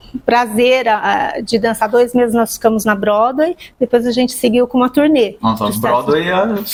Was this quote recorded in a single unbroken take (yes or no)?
yes